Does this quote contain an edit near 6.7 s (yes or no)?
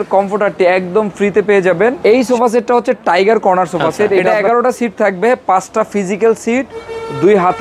no